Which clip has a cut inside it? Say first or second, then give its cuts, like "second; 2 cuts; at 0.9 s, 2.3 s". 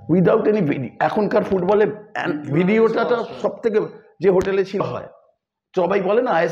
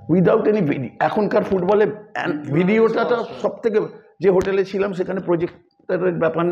first; 1 cut; at 4.8 s